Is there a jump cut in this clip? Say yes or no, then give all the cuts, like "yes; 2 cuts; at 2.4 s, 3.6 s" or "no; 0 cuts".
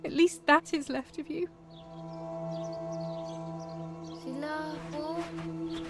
no; 0 cuts